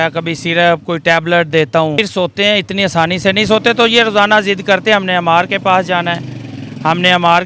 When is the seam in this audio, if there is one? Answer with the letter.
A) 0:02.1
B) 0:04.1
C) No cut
A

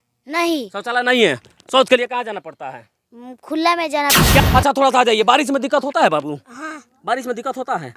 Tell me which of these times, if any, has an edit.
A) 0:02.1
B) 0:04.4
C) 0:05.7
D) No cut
B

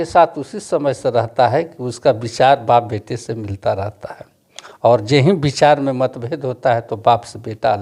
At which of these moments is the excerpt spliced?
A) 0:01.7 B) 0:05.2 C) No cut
C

